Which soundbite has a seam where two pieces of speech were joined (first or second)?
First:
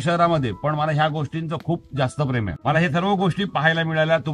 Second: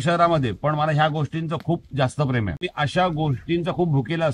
second